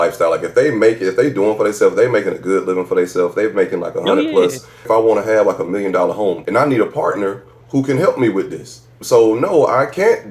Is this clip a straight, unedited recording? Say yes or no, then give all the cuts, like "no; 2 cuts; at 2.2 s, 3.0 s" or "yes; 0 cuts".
no; 4 cuts; at 4.9 s, 6.4 s, 7.6 s, 8.9 s